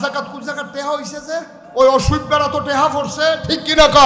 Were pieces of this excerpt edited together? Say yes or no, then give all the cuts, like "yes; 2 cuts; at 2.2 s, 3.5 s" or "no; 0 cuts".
yes; 1 cut; at 1.6 s